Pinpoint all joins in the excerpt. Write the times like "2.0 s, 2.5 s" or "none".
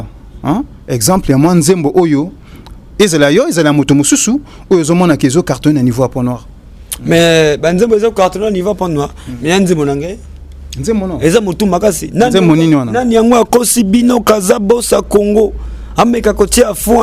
none